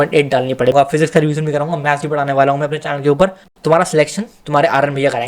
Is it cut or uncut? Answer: cut